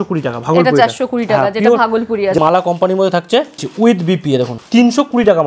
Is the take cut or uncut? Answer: cut